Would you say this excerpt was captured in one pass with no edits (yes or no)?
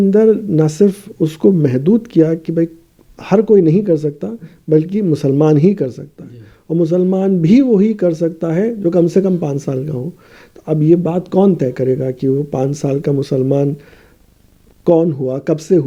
yes